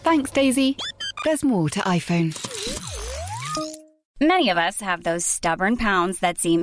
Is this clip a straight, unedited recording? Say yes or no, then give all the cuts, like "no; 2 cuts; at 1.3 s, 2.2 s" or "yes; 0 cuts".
no; 1 cut; at 4.0 s